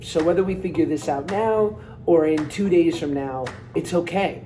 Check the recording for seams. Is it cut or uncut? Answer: cut